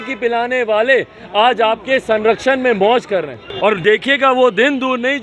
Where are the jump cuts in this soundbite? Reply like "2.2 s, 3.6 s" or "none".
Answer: 3.4 s